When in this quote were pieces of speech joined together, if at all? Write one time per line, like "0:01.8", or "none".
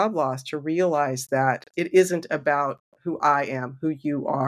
0:01.7